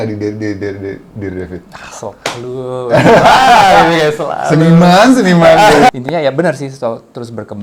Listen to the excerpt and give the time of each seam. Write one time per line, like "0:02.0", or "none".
0:05.9